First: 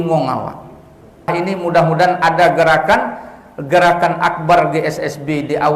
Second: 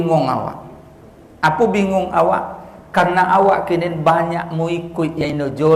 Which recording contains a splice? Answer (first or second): first